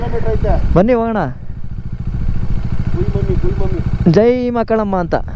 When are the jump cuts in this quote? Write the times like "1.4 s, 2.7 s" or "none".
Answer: none